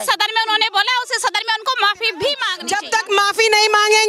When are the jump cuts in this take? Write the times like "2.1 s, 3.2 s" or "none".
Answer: 2.5 s